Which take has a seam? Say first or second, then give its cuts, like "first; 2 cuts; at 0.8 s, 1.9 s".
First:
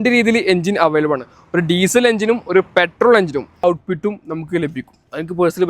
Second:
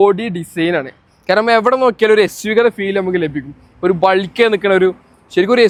first; 1 cut; at 3.6 s